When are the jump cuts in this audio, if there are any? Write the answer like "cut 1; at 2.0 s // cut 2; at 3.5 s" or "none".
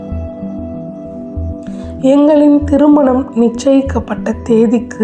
cut 1; at 2.0 s